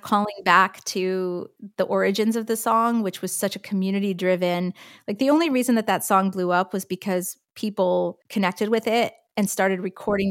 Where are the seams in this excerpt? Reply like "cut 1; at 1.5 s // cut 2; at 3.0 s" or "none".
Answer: cut 1; at 8.2 s